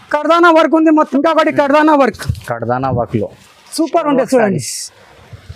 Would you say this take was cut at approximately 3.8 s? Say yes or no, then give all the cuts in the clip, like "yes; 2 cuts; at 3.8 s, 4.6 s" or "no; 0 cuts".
no; 1 cut; at 1.1 s